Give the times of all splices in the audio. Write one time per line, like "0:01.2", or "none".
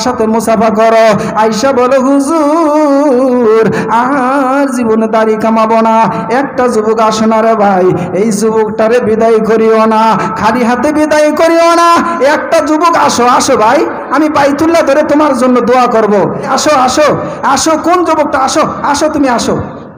0:16.5